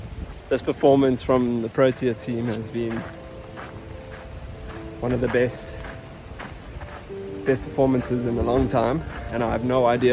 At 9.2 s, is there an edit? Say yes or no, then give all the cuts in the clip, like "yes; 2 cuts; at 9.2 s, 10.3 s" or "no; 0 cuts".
yes; 1 cut; at 9.2 s